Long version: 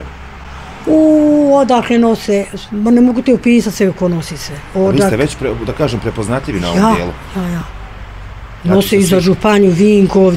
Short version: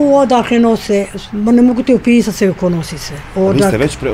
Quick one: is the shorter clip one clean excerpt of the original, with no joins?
yes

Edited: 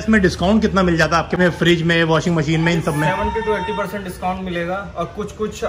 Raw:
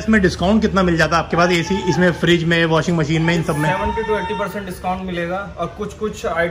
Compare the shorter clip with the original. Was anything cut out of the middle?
yes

